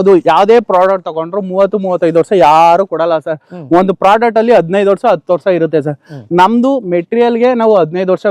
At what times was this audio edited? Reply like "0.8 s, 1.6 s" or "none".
none